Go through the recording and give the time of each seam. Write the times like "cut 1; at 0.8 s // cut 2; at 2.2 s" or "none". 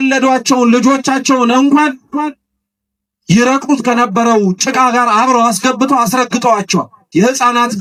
none